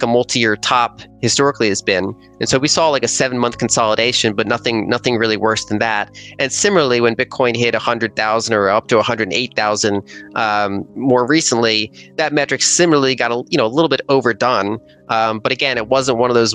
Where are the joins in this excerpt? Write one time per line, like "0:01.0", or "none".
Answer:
none